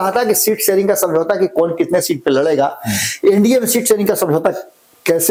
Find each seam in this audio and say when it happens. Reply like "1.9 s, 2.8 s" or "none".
none